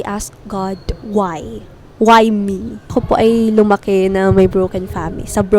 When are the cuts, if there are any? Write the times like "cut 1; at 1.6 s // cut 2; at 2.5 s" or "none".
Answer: cut 1; at 2.9 s